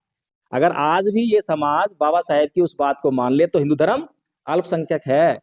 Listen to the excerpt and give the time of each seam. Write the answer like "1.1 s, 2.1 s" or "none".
none